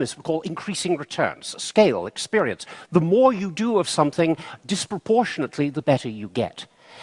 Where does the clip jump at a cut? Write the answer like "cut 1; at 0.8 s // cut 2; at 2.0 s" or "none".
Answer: cut 1; at 3.8 s